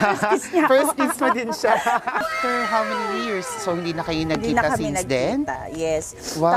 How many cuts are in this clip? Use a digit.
1